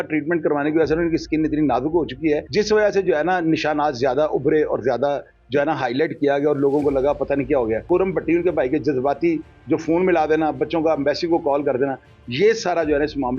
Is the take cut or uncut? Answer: cut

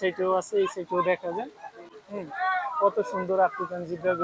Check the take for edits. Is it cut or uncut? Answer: uncut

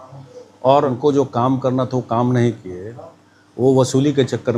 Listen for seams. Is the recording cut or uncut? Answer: cut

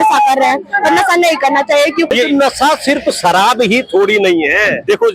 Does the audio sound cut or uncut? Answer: cut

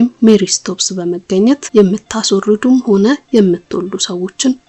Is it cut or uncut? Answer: uncut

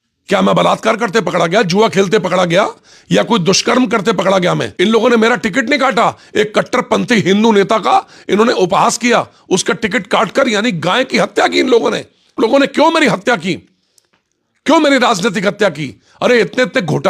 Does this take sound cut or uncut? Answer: cut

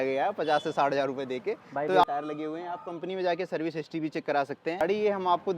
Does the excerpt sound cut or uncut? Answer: cut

